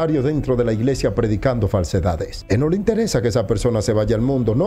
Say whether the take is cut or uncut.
cut